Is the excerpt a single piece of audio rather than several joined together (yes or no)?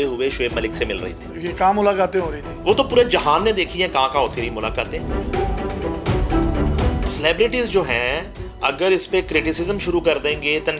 no